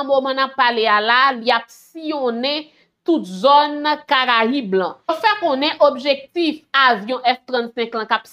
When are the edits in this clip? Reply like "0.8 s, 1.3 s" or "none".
5.1 s